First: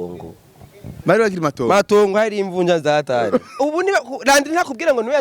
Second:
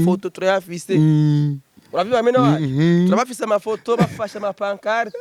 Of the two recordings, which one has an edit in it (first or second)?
first